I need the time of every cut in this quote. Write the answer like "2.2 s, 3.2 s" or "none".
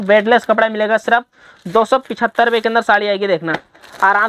none